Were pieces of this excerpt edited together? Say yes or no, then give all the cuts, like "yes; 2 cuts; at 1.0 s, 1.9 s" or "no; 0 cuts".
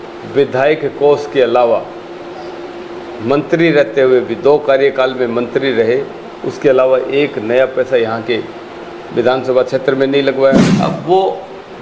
yes; 1 cut; at 10.7 s